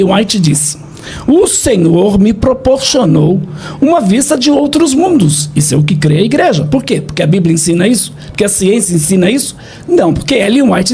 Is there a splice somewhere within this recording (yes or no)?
no